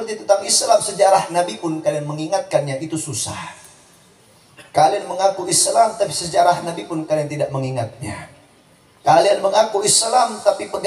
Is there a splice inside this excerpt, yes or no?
no